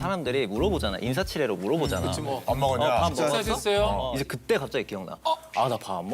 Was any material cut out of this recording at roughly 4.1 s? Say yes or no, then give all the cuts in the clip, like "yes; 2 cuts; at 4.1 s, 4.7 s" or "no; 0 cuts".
yes; 1 cut; at 4.1 s